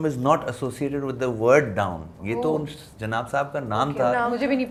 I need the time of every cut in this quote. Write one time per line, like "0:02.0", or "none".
none